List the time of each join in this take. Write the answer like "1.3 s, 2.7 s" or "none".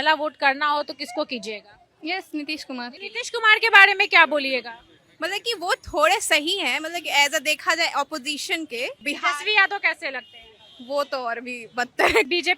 none